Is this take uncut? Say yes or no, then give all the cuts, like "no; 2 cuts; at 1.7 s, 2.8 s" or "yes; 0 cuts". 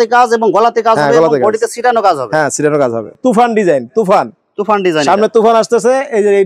no; 1 cut; at 3.2 s